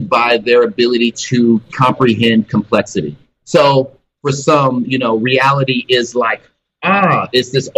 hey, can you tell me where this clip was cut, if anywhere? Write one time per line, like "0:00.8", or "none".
0:03.4
0:04.0